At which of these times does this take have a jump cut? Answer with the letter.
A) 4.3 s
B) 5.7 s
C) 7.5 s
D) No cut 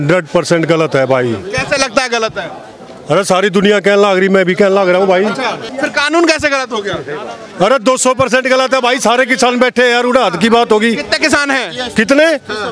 B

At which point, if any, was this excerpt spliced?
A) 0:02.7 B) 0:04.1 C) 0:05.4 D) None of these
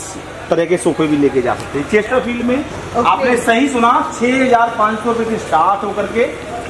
D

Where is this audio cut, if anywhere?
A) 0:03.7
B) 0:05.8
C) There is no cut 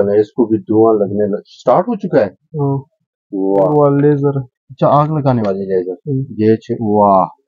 A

